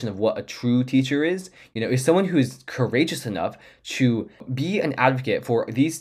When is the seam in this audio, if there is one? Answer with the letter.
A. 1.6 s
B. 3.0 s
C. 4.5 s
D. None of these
C